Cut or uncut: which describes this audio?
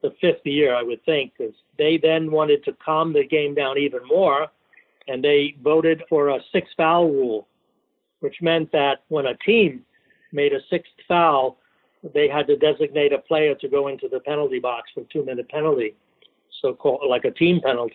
cut